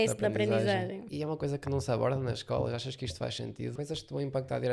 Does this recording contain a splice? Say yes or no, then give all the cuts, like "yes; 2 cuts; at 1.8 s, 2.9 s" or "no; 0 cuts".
yes; 2 cuts; at 1.0 s, 3.7 s